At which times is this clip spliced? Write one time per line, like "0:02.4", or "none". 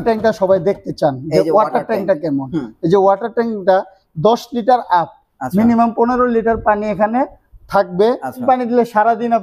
0:08.4